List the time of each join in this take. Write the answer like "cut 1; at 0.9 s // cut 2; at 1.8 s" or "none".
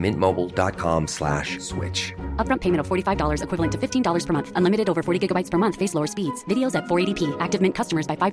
none